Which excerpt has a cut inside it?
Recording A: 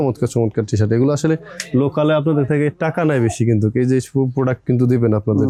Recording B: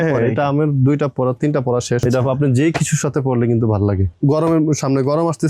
B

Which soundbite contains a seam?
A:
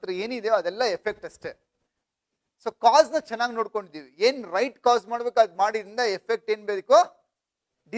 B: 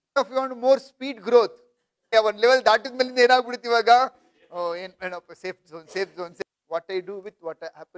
B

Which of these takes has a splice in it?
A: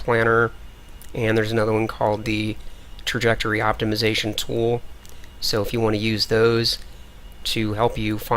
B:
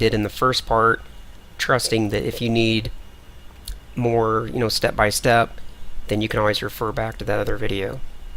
A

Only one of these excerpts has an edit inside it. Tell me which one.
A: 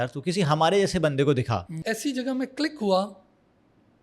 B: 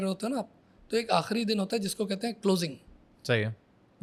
A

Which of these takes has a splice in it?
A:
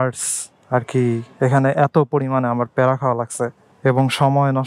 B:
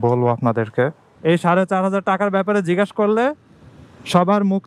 B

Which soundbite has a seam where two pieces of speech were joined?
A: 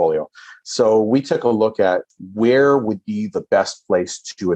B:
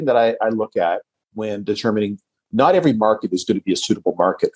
A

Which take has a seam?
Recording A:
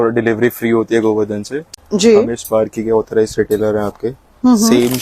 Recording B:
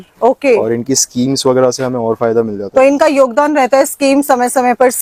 A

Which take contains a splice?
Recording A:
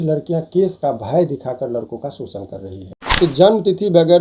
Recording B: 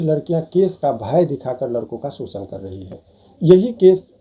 A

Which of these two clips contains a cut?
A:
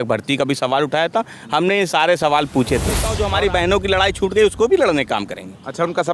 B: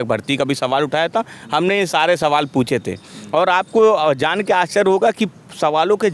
A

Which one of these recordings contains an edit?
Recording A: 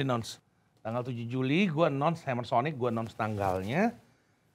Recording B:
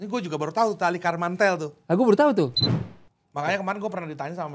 B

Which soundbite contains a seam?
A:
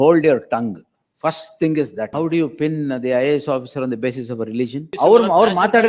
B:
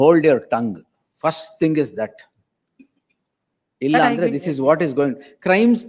A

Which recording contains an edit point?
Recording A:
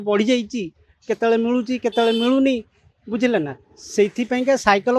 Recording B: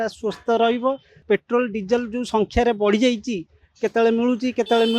B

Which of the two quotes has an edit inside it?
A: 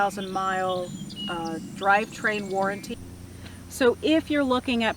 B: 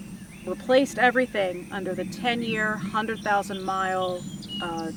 A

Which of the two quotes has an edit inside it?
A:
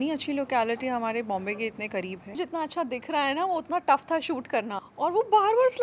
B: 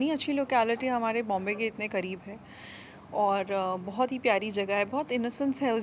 A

